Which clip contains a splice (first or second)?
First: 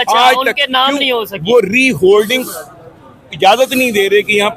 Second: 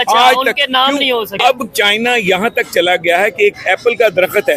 second